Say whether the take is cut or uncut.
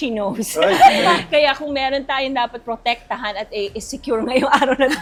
uncut